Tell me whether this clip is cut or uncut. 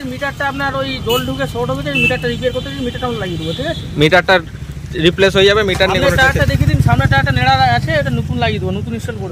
uncut